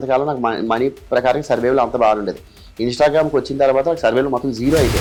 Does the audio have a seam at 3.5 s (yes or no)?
no